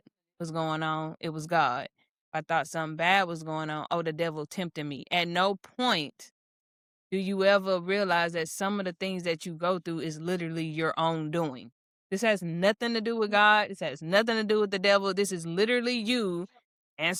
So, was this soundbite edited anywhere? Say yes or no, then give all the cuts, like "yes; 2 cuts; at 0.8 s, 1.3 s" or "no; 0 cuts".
no; 0 cuts